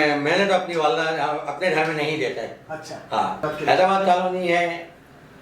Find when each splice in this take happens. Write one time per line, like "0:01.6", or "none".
0:03.4